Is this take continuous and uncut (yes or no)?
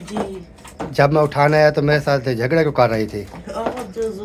yes